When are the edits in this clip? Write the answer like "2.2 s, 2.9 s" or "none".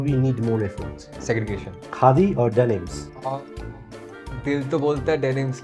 none